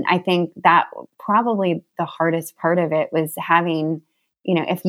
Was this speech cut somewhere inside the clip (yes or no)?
yes